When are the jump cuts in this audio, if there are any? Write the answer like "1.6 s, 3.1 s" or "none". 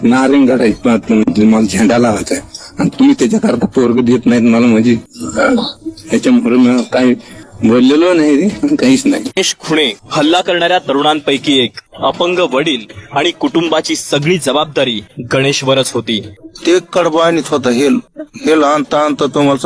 9.3 s